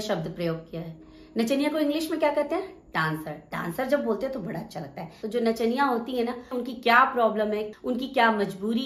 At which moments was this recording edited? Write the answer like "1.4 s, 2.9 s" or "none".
5.1 s, 6.5 s, 7.7 s